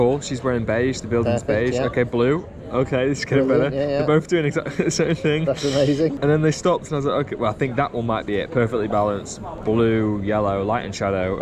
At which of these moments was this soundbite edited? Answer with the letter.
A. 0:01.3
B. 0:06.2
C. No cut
B